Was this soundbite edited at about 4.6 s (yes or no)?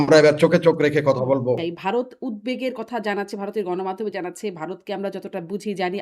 no